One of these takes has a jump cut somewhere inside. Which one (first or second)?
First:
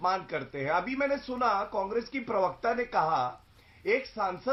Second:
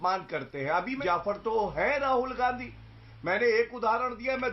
second